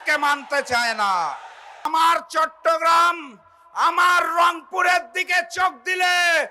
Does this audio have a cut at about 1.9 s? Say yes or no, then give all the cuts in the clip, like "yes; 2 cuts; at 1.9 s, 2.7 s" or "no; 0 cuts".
yes; 1 cut; at 1.9 s